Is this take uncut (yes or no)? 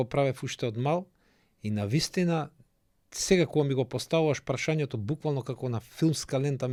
yes